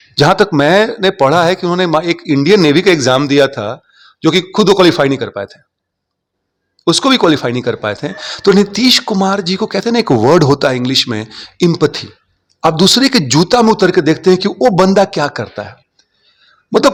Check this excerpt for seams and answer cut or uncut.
uncut